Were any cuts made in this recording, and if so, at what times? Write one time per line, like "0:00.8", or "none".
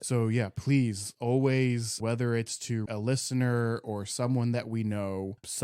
0:02.8